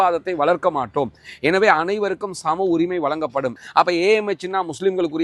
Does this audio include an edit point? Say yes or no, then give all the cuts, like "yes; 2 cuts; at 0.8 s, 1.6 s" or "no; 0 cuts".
yes; 1 cut; at 3.6 s